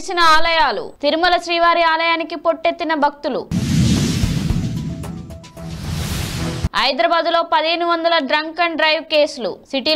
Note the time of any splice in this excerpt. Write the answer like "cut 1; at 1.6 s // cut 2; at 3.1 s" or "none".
none